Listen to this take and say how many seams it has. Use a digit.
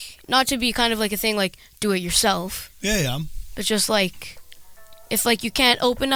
0